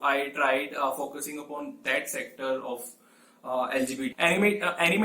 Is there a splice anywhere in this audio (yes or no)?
yes